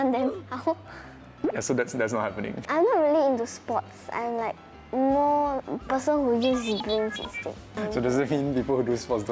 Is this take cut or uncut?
cut